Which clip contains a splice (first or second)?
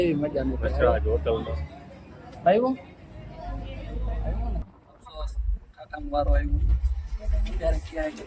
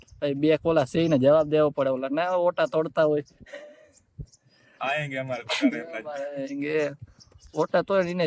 first